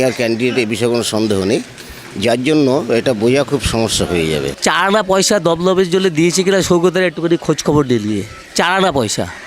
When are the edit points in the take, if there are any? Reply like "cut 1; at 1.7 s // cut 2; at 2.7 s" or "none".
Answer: cut 1; at 4.5 s

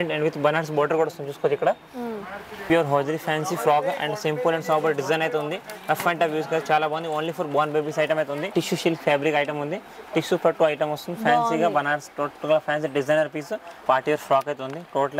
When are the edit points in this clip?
cut 1; at 2.3 s // cut 2; at 8.5 s // cut 3; at 13.7 s

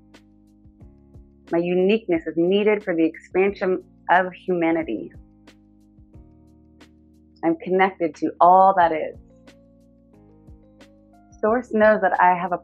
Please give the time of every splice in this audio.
cut 1; at 5.3 s // cut 2; at 7.3 s // cut 3; at 9.2 s // cut 4; at 10.9 s

